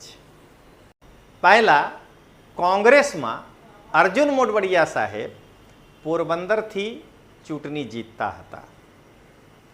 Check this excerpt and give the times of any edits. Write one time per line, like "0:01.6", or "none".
0:01.0